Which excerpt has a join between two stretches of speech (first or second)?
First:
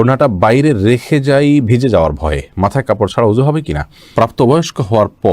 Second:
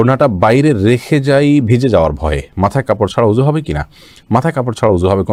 first